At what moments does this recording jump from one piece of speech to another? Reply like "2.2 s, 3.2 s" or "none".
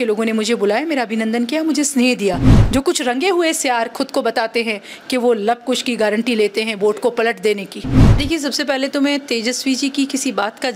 2.5 s, 8.1 s